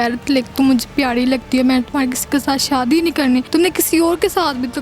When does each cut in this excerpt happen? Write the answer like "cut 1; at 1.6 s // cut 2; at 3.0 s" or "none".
cut 1; at 3.5 s